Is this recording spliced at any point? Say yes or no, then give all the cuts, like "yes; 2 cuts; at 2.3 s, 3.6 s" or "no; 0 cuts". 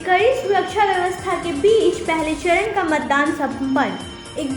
no; 0 cuts